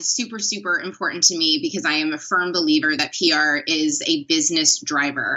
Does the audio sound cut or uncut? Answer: uncut